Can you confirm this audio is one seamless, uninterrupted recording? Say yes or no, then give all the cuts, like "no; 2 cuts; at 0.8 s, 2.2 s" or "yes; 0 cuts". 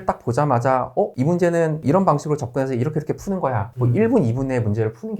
no; 1 cut; at 3.7 s